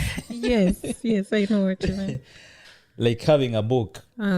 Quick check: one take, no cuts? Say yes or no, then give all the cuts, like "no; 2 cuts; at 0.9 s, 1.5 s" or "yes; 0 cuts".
yes; 0 cuts